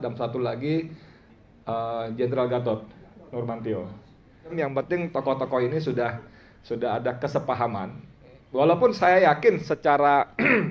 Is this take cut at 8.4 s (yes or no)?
no